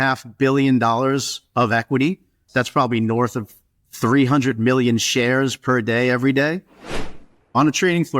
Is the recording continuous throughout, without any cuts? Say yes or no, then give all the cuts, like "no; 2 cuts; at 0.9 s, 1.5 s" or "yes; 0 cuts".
no; 1 cut; at 6.9 s